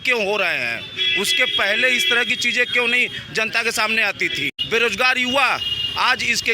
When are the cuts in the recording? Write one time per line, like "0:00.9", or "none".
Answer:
0:04.5